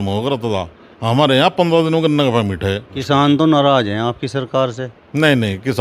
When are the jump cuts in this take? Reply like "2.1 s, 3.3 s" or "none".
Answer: 2.9 s